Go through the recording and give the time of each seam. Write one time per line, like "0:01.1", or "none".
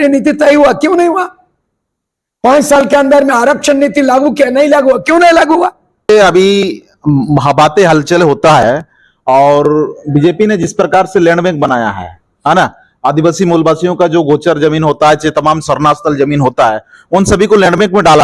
0:06.1